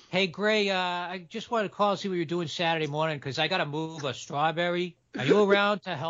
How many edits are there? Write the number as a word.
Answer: one